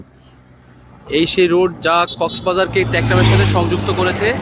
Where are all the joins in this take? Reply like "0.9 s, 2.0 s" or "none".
none